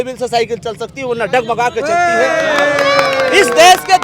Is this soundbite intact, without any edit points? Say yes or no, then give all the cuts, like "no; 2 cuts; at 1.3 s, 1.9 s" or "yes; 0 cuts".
yes; 0 cuts